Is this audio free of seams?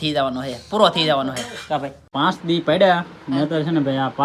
no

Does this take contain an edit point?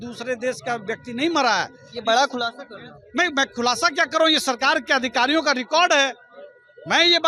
no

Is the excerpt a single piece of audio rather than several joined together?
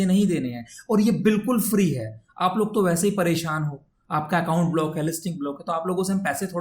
yes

